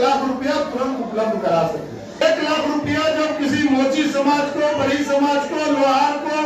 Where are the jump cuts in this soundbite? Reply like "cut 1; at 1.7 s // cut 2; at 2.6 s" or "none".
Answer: cut 1; at 2.2 s